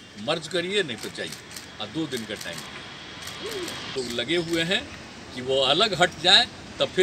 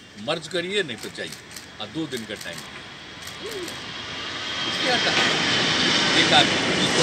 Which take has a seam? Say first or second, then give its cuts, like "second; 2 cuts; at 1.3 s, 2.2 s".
first; 1 cut; at 3.9 s